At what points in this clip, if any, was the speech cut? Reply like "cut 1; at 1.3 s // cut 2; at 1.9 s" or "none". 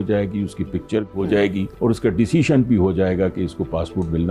cut 1; at 1.7 s